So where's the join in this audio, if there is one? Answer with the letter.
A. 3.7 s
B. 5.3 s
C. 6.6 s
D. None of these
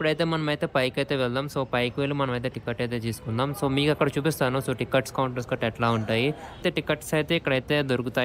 C